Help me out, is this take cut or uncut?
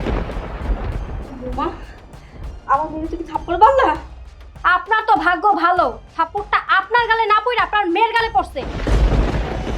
cut